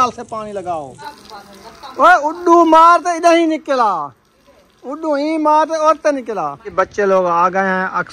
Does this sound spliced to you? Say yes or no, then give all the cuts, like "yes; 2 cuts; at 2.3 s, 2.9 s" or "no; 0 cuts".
yes; 2 cuts; at 1.1 s, 6.7 s